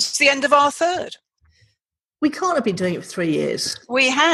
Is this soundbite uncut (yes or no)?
yes